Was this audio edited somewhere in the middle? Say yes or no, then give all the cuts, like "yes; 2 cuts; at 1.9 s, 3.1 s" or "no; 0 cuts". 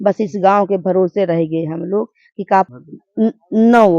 yes; 1 cut; at 2.7 s